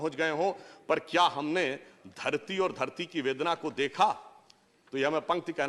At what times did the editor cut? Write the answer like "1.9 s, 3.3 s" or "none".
none